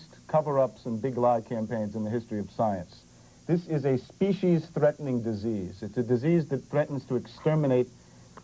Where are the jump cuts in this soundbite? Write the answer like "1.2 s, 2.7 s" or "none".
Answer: none